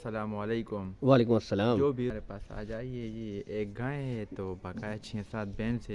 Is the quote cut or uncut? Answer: cut